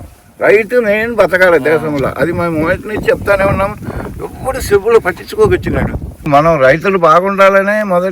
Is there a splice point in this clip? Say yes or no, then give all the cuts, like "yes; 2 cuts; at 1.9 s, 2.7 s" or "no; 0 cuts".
yes; 1 cut; at 6.3 s